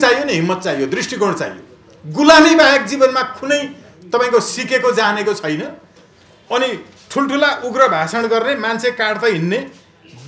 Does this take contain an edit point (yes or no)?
no